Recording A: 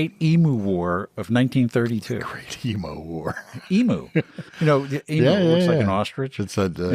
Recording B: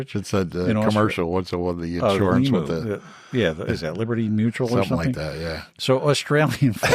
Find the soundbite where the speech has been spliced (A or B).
B